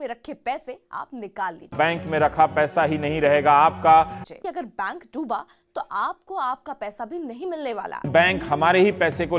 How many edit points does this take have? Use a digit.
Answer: 3